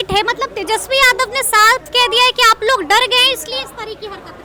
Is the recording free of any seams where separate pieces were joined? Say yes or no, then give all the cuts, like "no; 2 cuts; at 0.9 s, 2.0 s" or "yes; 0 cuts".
yes; 0 cuts